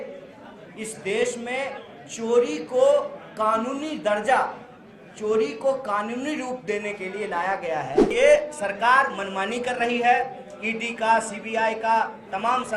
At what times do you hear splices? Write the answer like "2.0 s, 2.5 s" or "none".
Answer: 8.1 s